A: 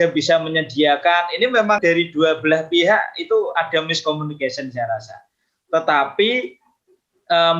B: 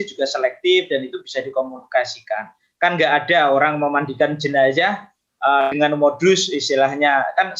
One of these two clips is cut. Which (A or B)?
A